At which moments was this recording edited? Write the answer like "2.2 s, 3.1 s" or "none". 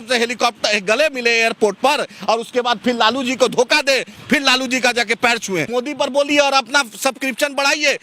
5.7 s